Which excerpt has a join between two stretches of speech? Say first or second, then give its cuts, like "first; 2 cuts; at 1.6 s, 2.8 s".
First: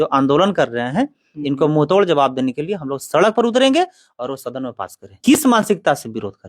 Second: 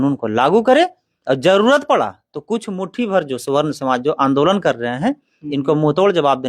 first; 1 cut; at 5.1 s